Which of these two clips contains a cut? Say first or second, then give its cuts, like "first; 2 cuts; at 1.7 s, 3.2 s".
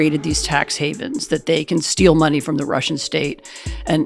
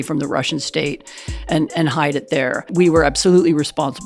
second; 1 cut; at 2.7 s